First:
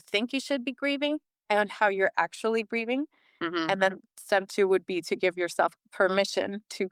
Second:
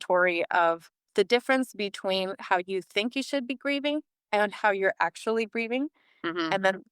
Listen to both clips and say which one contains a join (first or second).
second